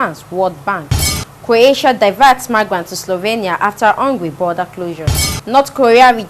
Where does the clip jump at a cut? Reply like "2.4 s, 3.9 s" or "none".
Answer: none